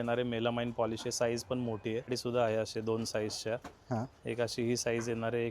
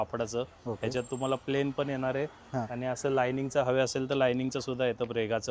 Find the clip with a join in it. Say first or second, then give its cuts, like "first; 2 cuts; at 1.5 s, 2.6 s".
first; 1 cut; at 2.1 s